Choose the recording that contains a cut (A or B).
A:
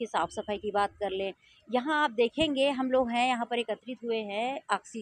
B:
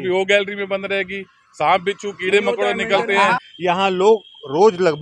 B